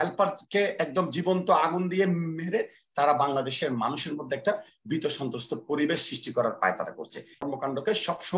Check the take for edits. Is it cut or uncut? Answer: cut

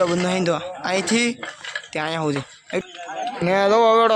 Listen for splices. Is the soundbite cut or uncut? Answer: cut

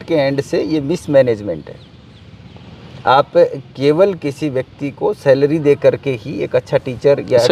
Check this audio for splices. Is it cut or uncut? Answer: uncut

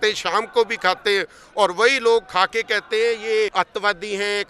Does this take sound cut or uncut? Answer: cut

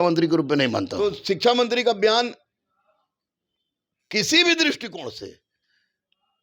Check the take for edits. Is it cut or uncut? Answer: cut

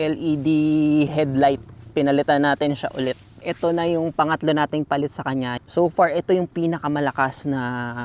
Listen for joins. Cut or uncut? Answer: cut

